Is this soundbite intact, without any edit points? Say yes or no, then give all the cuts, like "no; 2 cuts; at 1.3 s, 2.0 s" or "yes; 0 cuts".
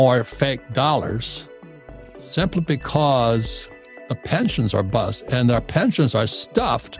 yes; 0 cuts